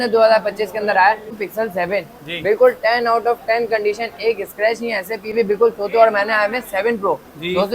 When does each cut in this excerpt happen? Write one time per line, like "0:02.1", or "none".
0:01.4
0:05.3

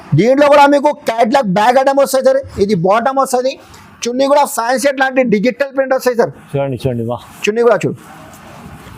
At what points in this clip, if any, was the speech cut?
none

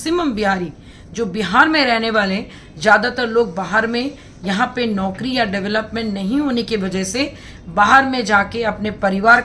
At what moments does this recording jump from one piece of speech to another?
none

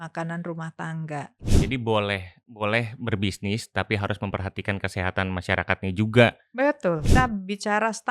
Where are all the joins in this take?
0:01.5
0:07.0

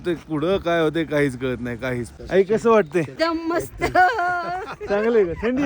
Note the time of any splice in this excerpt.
0:02.1
0:03.1

